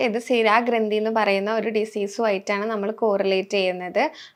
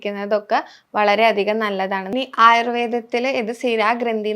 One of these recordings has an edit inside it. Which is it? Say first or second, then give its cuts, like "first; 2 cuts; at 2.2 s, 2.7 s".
second; 1 cut; at 2.1 s